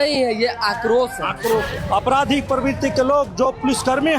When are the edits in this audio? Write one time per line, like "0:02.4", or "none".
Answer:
0:01.7

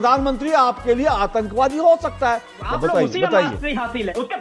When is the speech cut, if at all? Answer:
0:02.6

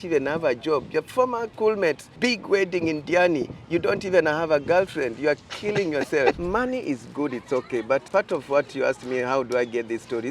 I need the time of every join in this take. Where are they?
0:01.5
0:02.1
0:06.4
0:08.1

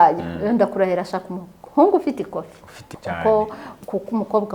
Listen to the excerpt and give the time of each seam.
0:02.9

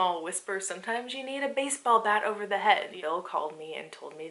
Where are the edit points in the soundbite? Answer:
0:02.9

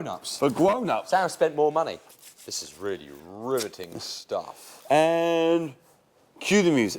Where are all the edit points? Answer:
0:02.0

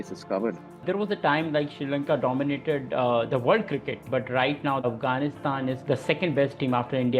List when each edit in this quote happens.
0:05.8

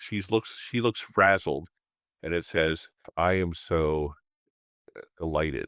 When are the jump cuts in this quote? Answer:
0:03.1

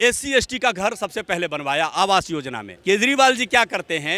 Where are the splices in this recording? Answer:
0:02.7

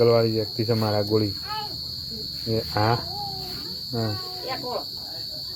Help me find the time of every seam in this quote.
none

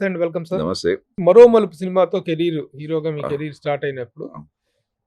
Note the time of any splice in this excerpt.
0:01.1

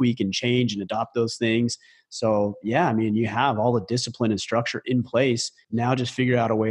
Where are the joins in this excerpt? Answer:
0:05.5

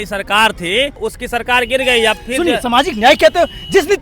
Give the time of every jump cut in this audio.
0:01.0

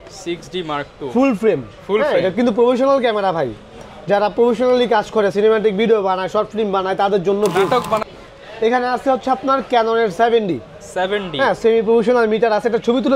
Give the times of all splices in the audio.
0:08.0

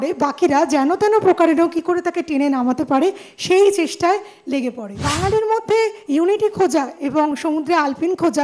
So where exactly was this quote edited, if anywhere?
0:05.0

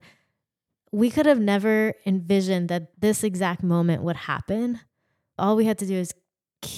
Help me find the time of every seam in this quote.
0:02.9
0:05.4

